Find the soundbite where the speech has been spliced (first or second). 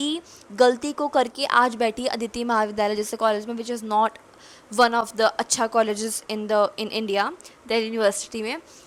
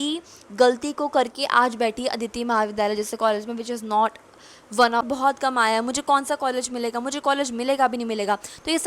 second